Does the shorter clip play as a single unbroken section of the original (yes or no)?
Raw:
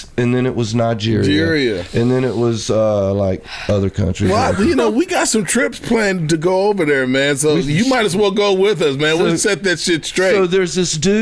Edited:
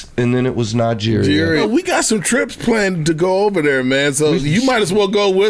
no